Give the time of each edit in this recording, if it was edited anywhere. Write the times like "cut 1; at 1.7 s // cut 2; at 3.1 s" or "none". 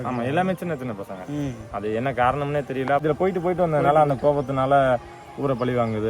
cut 1; at 3.0 s